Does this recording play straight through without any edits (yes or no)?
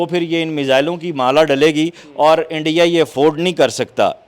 yes